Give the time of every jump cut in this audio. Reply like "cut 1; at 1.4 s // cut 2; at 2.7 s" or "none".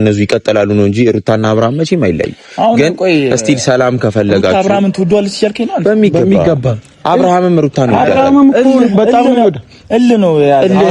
none